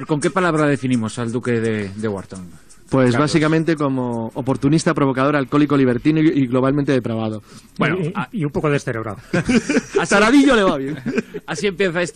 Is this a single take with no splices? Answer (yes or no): yes